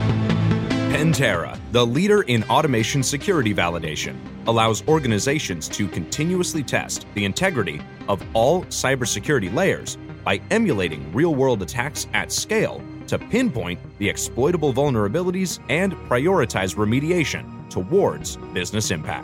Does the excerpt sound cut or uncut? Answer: cut